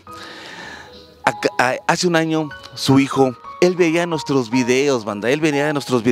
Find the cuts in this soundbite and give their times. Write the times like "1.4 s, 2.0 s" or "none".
3.5 s